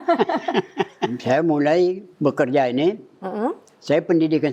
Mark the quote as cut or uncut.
cut